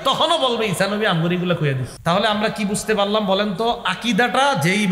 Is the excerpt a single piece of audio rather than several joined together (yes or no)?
no